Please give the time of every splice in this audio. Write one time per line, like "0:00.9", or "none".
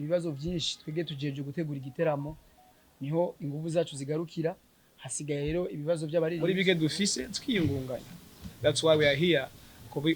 0:06.4